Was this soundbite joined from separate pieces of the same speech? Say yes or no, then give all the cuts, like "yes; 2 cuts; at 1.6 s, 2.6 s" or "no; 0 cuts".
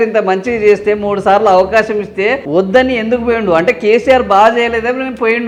no; 0 cuts